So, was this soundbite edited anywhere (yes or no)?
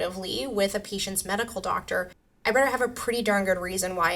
no